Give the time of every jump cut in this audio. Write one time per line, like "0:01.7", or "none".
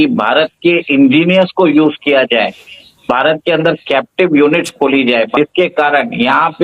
0:05.3

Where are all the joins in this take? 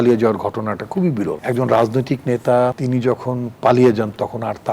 0:01.4
0:02.8

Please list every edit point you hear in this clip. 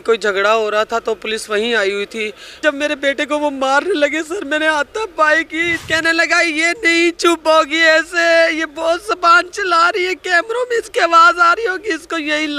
0:02.6
0:05.8

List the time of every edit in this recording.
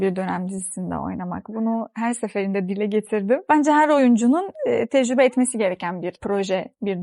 0:03.5
0:06.2

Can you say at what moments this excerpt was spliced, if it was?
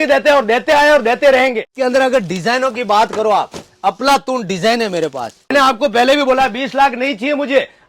0:01.7
0:05.5

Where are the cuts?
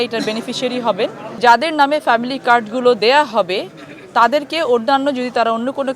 0:01.4

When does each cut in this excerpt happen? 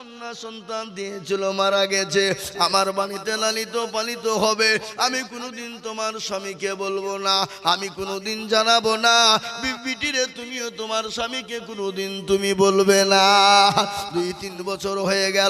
none

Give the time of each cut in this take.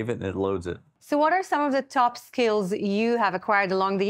0:01.0

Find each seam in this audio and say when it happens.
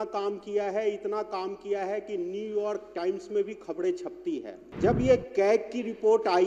0:04.6

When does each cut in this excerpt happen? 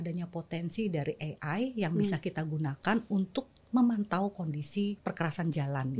0:05.0

